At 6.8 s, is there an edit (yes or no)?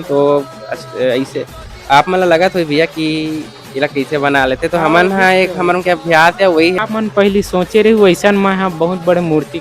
yes